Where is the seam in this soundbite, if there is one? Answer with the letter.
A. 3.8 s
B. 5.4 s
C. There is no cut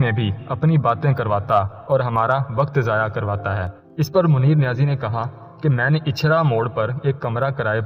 A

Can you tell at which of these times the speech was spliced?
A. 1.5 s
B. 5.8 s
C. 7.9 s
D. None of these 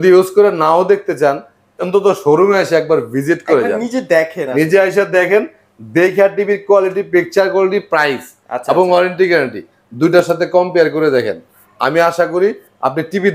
D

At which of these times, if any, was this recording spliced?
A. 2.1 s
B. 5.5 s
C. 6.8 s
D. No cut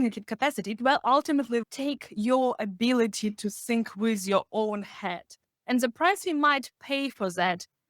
B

